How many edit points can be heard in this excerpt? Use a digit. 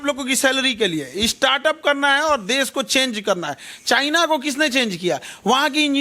0